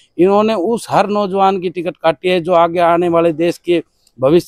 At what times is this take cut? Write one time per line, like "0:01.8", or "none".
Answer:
none